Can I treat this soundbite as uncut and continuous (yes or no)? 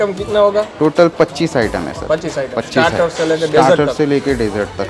yes